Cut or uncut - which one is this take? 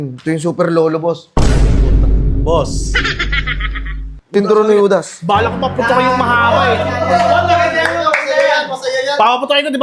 cut